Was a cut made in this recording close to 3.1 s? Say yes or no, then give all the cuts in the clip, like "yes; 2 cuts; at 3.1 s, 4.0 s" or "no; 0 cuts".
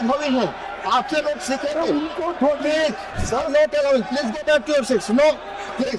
yes; 1 cut; at 3.1 s